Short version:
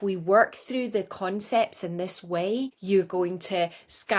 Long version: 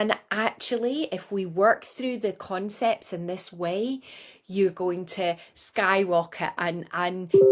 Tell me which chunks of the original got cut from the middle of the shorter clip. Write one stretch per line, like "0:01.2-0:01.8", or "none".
0:04.1-0:04.4

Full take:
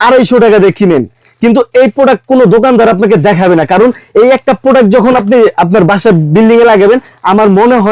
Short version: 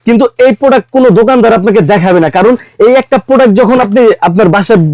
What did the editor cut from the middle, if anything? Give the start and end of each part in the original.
none

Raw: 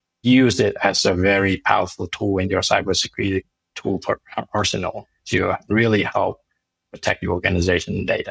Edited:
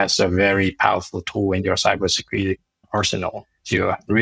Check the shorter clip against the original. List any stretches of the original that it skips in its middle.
0:03.7-0:04.5

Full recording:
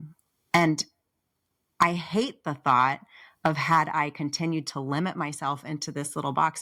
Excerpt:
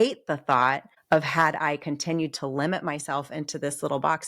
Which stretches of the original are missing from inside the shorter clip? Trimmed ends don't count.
0:03.1-0:03.2

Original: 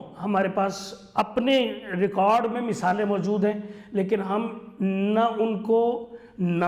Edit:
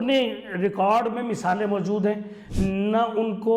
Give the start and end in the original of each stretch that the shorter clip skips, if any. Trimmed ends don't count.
0:03.8-0:04.6

